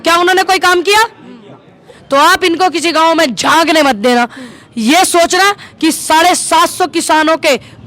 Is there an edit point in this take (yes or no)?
yes